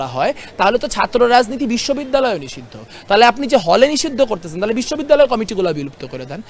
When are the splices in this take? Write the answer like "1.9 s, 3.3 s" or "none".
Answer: none